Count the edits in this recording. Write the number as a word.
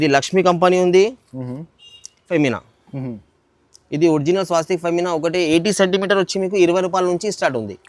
one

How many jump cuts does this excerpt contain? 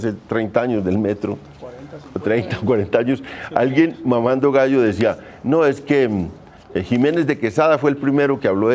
one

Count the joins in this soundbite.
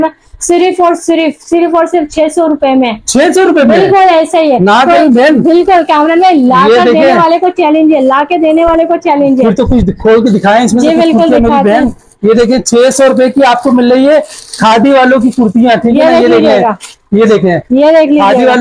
zero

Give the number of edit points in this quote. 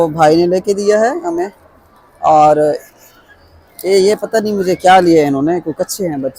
zero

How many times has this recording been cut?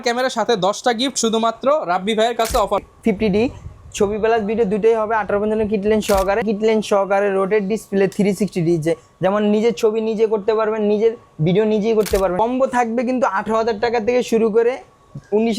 three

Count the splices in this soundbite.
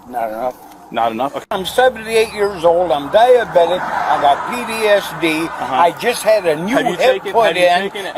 one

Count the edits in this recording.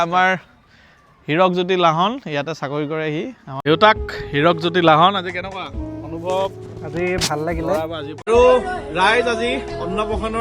two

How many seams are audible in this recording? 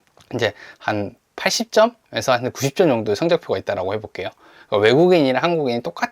one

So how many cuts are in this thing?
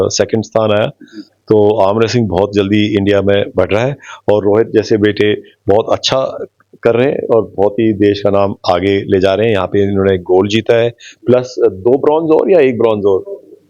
zero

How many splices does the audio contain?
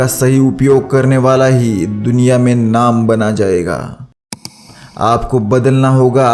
one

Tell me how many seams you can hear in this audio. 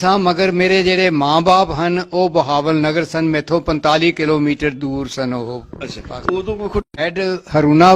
one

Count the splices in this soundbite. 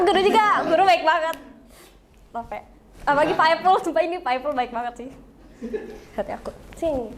zero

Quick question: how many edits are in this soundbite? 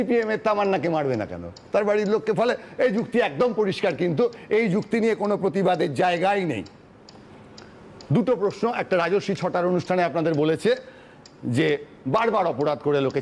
zero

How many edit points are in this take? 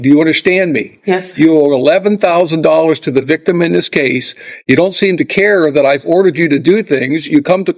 zero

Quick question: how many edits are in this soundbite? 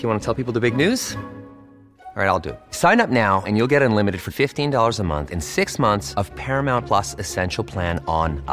zero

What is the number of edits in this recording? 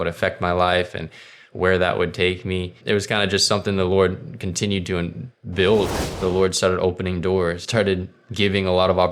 three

